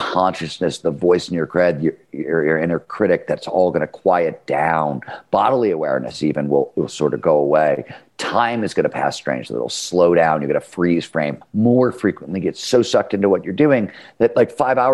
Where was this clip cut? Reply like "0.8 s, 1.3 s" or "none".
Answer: 11.4 s